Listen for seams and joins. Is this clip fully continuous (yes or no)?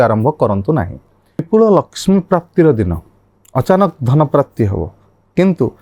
no